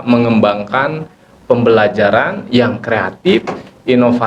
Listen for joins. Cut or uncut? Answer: uncut